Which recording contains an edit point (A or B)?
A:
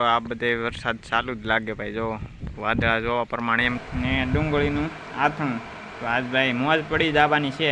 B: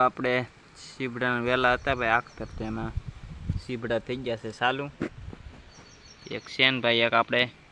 A